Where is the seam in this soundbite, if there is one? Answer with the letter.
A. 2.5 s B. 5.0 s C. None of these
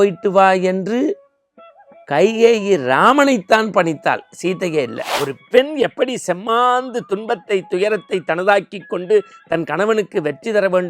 B